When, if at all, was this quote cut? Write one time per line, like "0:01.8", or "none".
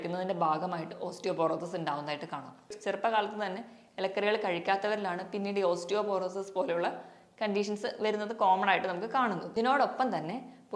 0:02.7
0:09.4